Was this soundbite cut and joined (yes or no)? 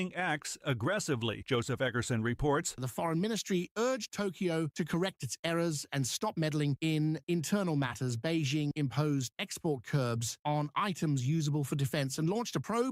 no